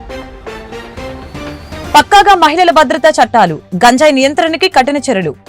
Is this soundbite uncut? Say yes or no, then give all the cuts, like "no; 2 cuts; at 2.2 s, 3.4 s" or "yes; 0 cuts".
no; 1 cut; at 1.8 s